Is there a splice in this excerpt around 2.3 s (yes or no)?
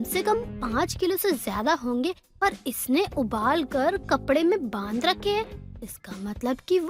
no